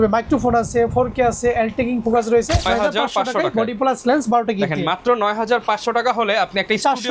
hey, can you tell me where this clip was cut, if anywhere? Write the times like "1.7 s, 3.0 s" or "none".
2.7 s